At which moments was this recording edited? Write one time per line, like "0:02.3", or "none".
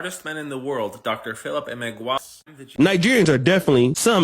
0:02.2